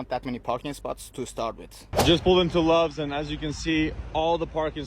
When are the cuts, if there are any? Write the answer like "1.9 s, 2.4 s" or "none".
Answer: 1.8 s